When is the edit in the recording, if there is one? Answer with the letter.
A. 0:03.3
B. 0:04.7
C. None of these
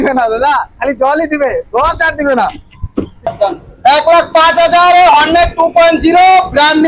A